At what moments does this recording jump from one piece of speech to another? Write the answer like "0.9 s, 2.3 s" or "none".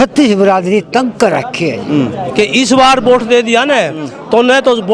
2.3 s